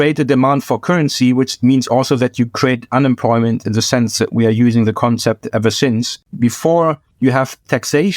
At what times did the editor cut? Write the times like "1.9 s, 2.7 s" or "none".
6.2 s